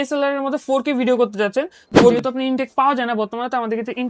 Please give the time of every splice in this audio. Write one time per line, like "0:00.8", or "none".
0:02.2